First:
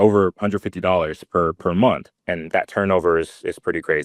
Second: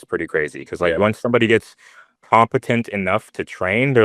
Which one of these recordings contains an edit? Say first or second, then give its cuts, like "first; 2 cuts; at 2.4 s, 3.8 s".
first; 1 cut; at 2.2 s